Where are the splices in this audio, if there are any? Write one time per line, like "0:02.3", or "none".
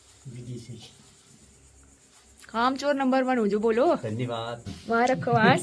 0:04.7